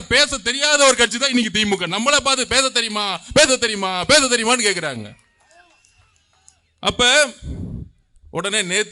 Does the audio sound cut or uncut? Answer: uncut